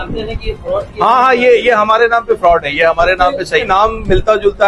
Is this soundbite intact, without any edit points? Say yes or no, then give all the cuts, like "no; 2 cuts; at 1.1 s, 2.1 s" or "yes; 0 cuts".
no; 1 cut; at 3.7 s